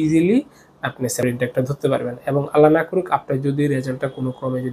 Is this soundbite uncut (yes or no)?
no